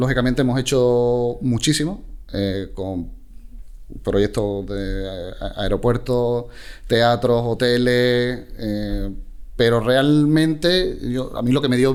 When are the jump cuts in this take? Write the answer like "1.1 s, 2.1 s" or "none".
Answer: none